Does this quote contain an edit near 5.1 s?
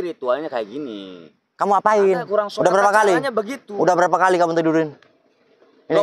no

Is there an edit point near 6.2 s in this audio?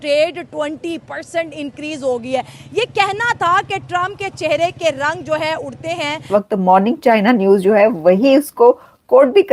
yes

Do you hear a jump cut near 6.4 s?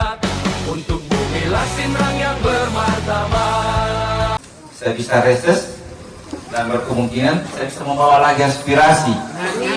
no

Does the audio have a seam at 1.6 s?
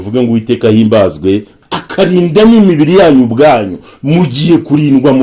yes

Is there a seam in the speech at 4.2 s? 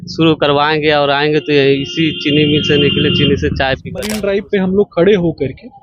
yes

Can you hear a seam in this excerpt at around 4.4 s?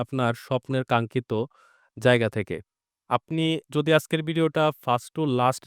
no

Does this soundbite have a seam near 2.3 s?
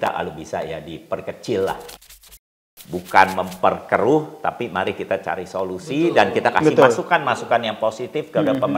yes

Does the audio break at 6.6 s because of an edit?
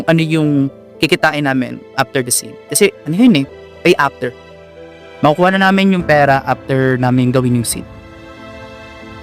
no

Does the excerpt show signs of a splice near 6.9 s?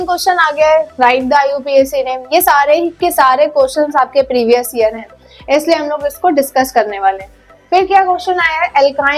no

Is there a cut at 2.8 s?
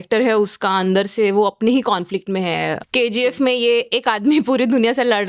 yes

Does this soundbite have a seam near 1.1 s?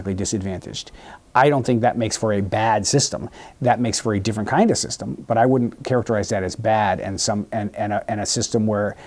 no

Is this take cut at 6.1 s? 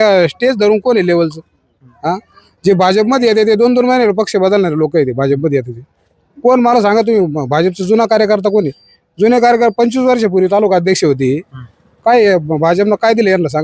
no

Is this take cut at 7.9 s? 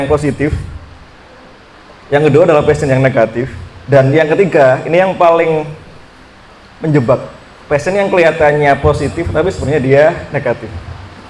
no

